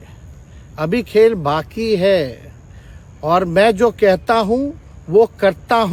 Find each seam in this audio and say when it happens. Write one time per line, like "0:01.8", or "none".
none